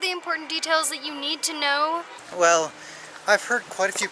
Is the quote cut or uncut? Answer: cut